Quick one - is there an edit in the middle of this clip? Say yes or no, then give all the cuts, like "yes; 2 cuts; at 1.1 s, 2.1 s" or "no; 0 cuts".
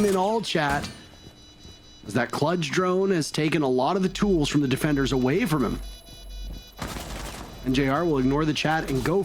no; 0 cuts